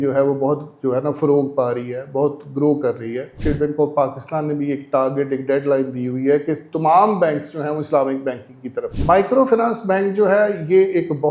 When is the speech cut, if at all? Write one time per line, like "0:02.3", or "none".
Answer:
0:03.3
0:08.9